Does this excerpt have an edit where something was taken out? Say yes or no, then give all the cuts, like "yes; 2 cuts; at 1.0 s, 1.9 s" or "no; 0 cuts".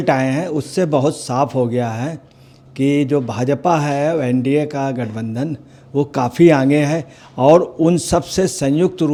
no; 0 cuts